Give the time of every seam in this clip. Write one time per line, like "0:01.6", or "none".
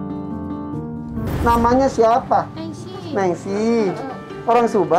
0:01.2